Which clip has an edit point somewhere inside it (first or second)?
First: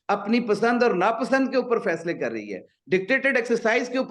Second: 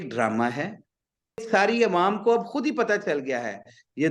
second